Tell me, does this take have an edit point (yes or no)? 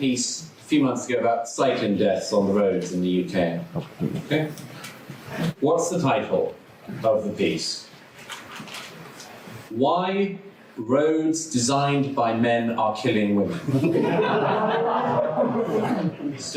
no